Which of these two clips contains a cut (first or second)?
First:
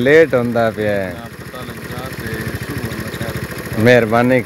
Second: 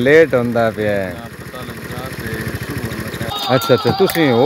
second